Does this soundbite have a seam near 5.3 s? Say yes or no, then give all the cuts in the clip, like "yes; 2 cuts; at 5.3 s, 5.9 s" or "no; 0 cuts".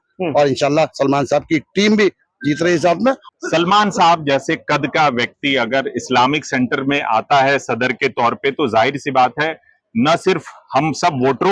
no; 1 cut; at 3.2 s